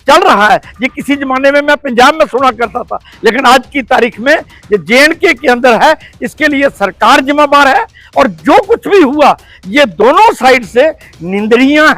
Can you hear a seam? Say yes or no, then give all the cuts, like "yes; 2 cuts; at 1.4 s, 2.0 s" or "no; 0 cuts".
no; 0 cuts